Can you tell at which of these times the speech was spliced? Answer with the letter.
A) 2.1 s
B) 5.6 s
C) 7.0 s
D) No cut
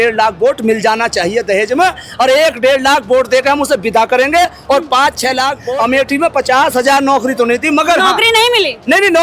B